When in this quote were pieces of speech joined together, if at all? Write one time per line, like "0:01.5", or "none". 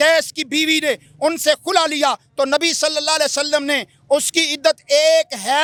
none